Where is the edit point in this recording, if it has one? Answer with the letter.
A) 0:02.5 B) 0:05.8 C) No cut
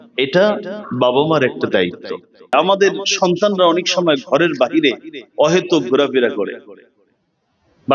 A